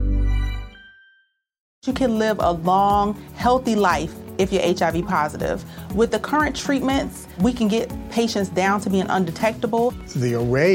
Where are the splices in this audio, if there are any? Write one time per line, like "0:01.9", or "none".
0:01.7